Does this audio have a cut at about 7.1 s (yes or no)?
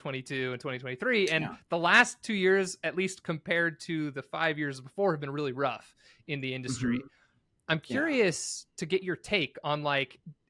no